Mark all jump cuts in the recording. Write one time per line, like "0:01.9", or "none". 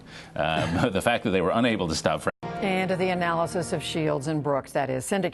none